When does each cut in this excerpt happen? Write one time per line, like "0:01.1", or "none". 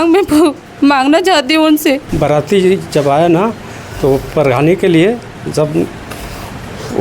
0:02.1